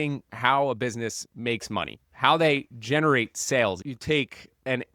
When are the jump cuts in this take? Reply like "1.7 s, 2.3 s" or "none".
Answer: 3.9 s